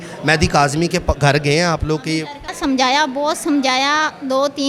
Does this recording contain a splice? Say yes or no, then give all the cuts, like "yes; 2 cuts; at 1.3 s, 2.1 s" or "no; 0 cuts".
yes; 1 cut; at 2.5 s